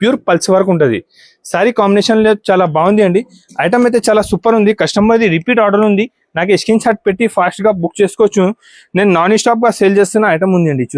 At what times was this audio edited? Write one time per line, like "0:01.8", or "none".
none